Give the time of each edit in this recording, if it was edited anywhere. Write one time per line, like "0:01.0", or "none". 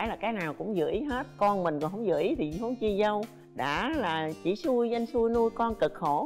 none